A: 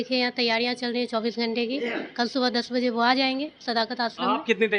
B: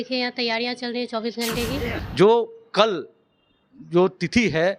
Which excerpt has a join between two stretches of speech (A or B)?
B